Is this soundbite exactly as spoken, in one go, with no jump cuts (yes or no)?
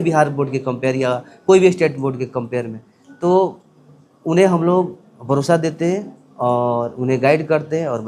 yes